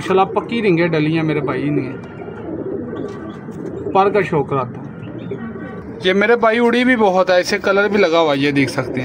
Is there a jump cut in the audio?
no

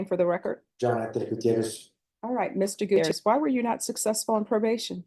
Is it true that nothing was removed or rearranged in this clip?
no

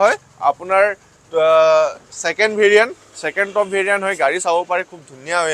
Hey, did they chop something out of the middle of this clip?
no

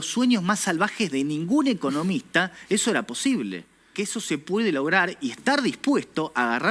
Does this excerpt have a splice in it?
yes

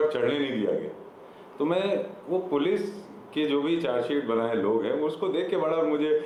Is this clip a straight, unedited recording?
yes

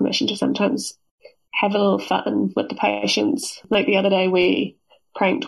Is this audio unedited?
yes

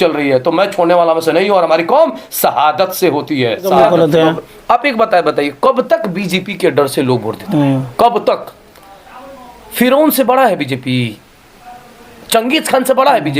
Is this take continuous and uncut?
no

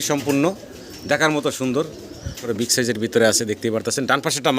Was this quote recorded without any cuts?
no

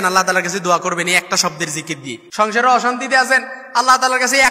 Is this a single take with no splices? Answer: no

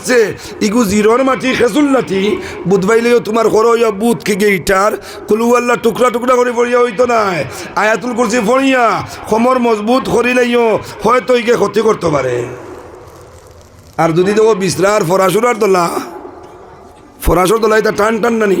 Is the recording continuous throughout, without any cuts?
yes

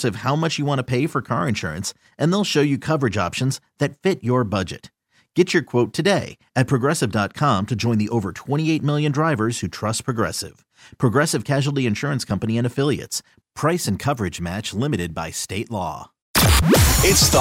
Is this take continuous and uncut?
no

